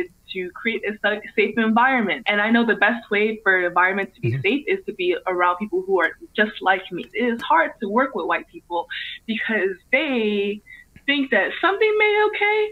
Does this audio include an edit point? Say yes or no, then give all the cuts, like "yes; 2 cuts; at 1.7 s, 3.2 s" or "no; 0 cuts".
yes; 1 cut; at 7.0 s